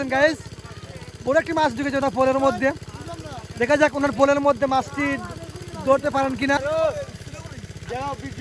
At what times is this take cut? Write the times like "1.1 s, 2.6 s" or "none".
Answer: 6.6 s